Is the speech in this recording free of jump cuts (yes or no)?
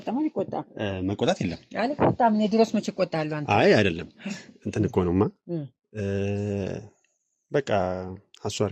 yes